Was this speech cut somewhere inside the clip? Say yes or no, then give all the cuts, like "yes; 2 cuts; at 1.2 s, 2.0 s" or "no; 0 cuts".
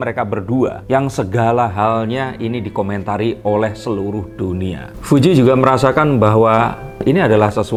no; 0 cuts